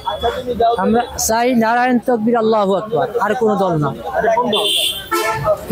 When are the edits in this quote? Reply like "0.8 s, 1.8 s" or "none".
none